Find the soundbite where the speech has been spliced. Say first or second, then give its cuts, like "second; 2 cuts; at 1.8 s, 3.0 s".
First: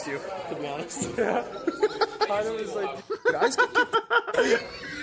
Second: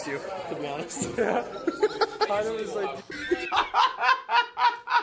second; 1 cut; at 3.0 s